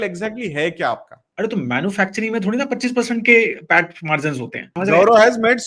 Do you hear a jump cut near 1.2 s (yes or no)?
yes